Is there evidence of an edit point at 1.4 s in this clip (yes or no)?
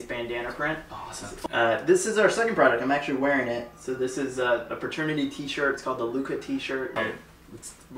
yes